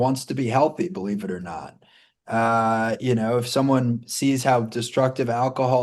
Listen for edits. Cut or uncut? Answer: uncut